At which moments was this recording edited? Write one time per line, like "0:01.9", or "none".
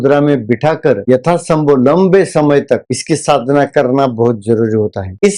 none

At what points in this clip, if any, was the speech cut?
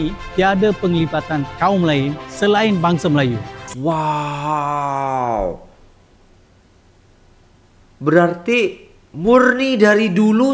none

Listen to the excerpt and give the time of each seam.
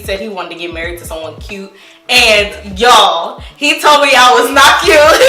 none

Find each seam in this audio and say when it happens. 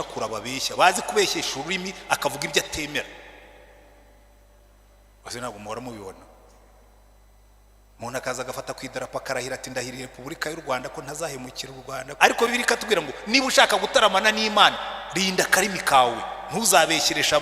0:12.1

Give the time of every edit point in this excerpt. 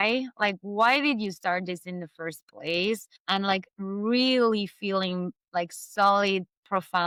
none

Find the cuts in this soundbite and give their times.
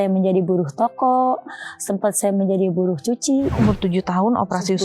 0:03.6

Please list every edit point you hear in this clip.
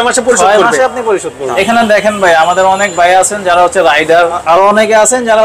0:01.5
0:04.4

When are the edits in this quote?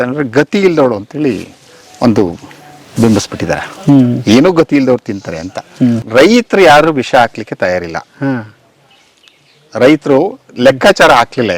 0:06.0

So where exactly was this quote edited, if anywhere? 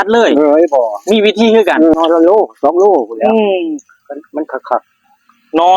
0:01.9

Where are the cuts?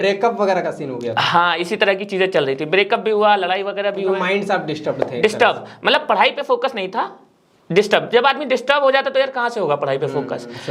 none

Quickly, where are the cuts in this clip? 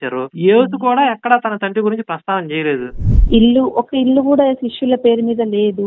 0:03.1

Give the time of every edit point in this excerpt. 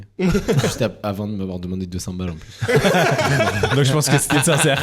none

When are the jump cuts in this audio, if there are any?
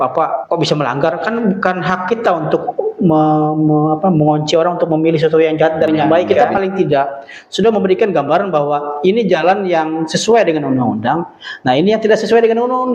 0:06.4

